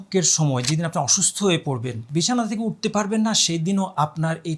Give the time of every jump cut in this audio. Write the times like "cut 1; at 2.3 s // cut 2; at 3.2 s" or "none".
cut 1; at 1.9 s